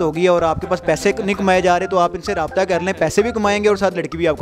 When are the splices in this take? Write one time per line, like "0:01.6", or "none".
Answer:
none